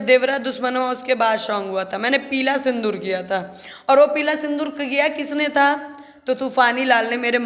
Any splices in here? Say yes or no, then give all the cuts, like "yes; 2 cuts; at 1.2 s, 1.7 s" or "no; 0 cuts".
no; 0 cuts